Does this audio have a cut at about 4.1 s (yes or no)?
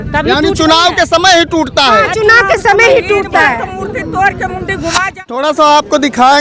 no